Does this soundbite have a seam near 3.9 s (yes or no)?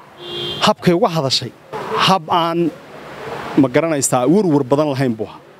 no